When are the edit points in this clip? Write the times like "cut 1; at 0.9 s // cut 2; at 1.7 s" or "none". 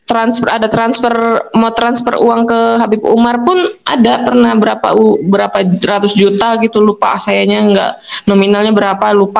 none